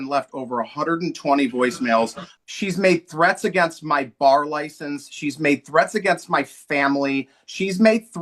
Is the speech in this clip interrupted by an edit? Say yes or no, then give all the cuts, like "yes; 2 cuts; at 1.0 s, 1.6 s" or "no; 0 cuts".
yes; 1 cut; at 2.2 s